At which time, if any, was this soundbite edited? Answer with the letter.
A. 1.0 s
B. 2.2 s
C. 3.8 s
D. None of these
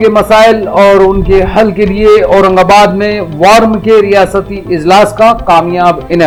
D